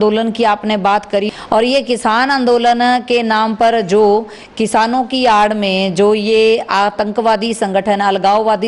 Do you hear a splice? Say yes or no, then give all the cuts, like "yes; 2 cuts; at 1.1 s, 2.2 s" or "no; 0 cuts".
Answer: yes; 1 cut; at 1.3 s